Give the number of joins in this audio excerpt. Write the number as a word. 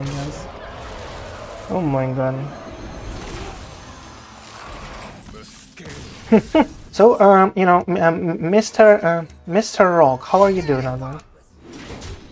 one